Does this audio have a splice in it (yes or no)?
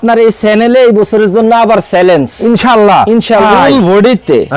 yes